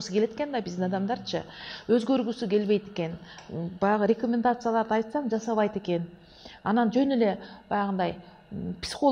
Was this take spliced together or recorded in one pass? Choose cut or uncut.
uncut